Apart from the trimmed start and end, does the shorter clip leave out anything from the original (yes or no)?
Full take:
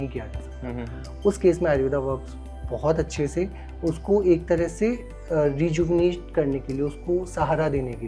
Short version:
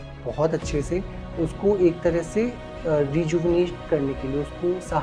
no